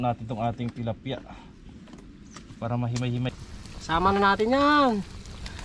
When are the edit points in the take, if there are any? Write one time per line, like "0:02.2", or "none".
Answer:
0:03.4